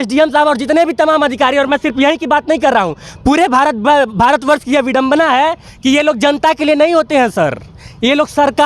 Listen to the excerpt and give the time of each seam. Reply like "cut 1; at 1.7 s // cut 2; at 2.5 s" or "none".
none

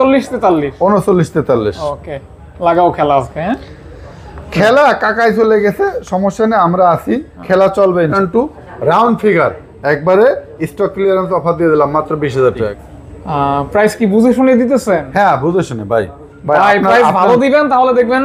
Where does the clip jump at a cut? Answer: cut 1; at 8.0 s // cut 2; at 12.7 s

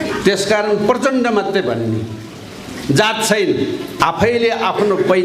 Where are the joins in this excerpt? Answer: cut 1; at 4.0 s

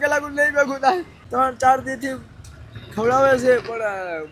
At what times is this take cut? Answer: cut 1; at 1.2 s

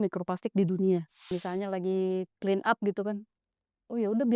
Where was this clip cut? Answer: cut 1; at 1.3 s

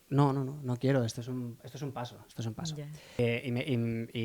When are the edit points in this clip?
cut 1; at 3.2 s

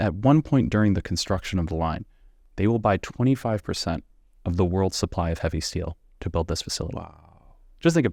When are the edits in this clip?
none

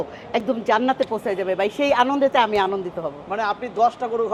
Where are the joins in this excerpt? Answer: none

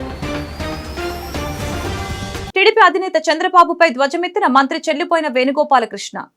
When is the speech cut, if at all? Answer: cut 1; at 2.4 s

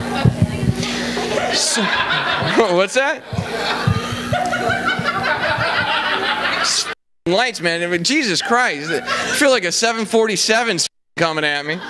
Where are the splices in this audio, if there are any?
none

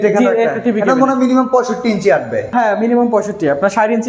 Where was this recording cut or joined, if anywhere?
cut 1; at 2.5 s

